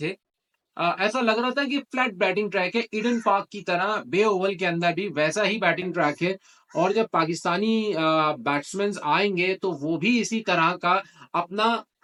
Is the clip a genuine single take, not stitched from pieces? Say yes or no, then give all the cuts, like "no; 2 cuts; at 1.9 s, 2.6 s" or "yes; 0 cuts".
yes; 0 cuts